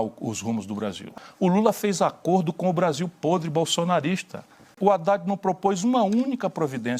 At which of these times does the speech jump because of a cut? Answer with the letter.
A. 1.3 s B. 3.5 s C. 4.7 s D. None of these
C